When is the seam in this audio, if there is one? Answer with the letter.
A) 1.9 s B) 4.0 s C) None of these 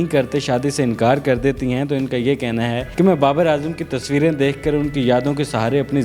C